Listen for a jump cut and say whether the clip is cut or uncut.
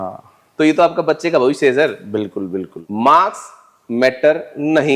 cut